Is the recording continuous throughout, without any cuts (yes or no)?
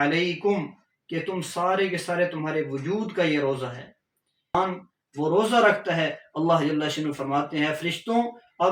no